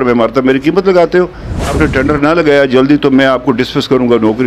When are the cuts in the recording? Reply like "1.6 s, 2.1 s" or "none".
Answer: 1.7 s